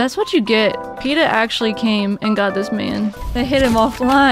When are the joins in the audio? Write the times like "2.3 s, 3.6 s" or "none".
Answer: 3.2 s